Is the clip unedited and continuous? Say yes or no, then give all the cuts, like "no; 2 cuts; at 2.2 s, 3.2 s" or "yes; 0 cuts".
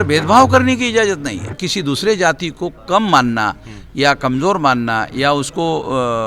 no; 1 cut; at 1.6 s